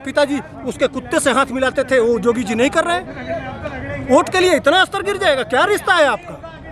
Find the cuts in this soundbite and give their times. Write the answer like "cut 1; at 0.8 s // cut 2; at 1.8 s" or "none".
none